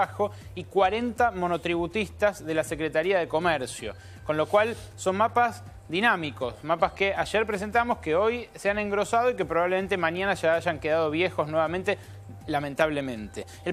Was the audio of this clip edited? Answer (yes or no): yes